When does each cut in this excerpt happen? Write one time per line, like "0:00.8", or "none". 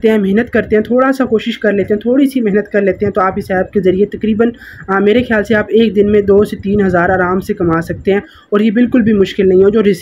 none